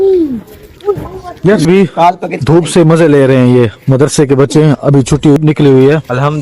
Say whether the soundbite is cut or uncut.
cut